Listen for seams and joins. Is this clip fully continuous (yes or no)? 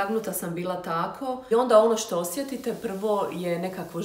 no